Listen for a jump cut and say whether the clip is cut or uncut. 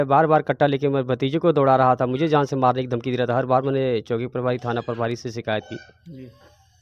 uncut